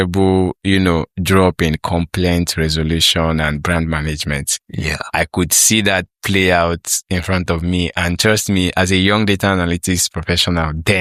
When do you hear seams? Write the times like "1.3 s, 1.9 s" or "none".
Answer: none